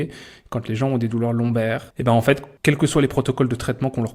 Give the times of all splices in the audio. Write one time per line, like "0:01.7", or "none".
0:01.9
0:02.5